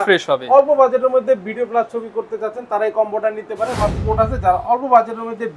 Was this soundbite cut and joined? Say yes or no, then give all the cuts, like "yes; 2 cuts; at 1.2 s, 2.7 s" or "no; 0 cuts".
yes; 1 cut; at 4.0 s